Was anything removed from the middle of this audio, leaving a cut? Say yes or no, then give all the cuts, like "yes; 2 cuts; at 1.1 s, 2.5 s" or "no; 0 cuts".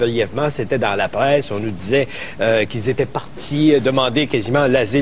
no; 0 cuts